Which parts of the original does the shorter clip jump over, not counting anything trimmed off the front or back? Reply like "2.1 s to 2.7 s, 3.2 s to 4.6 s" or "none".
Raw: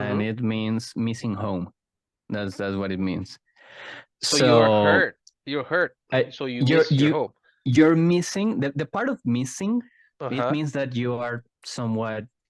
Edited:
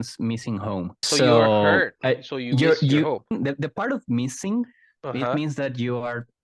1.7 s to 4.2 s, 5.1 s to 6.0 s, 7.4 s to 8.5 s